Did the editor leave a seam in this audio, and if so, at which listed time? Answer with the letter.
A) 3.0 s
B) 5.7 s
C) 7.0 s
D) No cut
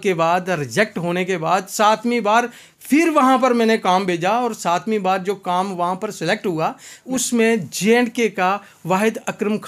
C